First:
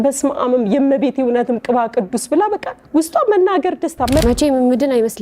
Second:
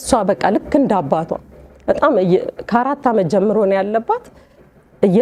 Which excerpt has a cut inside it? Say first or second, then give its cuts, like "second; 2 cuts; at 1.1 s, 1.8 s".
first; 1 cut; at 4.2 s